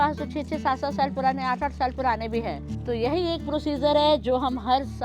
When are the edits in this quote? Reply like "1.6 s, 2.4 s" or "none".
2.7 s